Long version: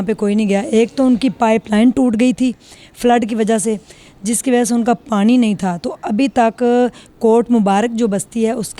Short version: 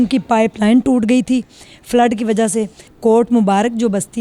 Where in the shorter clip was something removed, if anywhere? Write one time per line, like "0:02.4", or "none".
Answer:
0:02.9